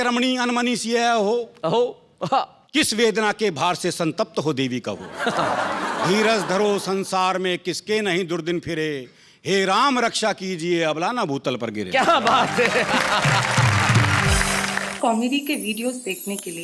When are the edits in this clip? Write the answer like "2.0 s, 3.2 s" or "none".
14.8 s